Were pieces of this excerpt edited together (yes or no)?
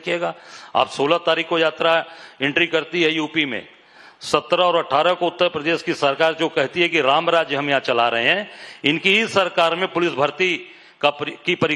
no